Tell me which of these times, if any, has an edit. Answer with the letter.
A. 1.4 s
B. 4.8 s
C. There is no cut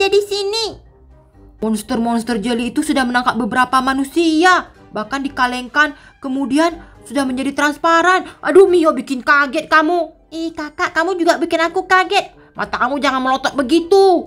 A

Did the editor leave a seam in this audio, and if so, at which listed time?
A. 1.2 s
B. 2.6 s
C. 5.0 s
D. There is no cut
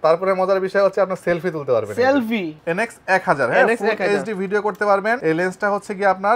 B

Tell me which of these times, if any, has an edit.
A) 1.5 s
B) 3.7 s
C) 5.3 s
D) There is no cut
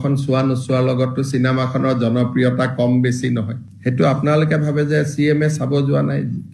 B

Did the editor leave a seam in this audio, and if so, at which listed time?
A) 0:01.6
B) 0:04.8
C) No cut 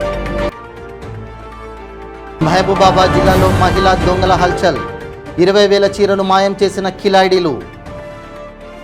A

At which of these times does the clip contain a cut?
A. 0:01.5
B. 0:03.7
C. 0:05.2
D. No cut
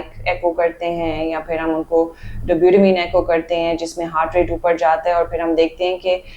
D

